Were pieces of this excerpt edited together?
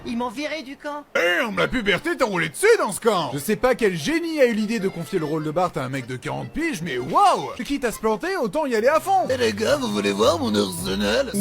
yes; 3 cuts; at 1.2 s, 7.6 s, 9.3 s

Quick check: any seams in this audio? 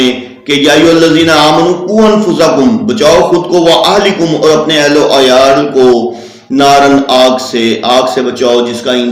no; 0 cuts

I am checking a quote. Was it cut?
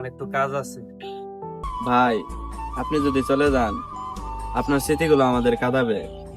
yes; 1 cut; at 1.6 s

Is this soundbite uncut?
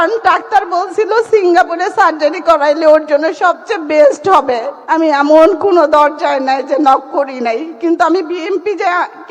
no; 1 cut; at 4.7 s

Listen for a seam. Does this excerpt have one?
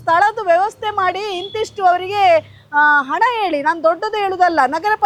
no; 0 cuts

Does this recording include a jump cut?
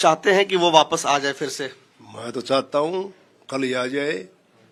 no; 0 cuts

